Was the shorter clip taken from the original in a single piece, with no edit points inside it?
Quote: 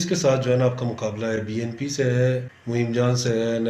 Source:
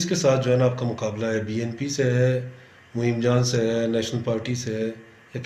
no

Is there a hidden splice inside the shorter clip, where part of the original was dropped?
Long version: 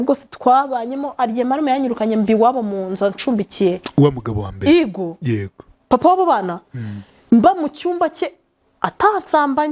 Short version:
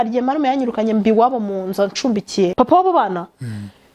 yes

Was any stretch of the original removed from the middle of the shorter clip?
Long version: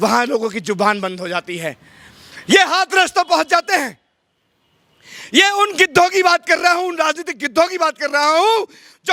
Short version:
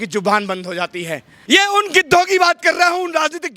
yes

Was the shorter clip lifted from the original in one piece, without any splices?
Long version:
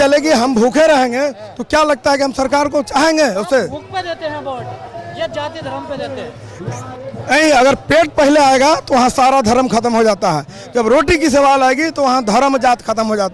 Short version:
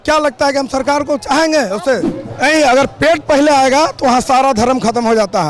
no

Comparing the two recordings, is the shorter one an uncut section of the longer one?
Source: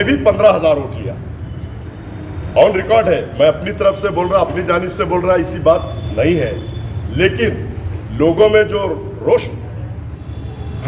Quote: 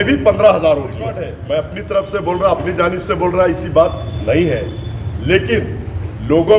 no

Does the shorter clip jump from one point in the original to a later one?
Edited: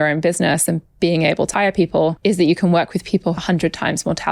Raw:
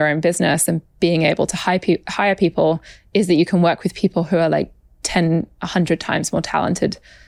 yes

